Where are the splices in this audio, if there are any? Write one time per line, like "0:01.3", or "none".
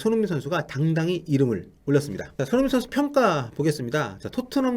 0:02.2